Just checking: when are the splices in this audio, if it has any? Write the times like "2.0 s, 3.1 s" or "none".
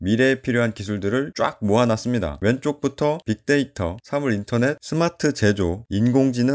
2.3 s